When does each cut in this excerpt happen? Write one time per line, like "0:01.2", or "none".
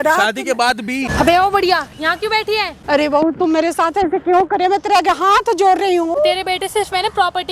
0:01.1
0:02.8
0:06.2